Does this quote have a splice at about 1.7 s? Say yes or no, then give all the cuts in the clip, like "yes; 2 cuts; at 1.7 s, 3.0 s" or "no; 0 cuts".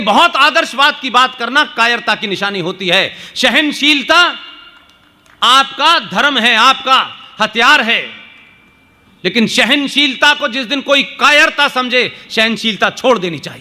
no; 0 cuts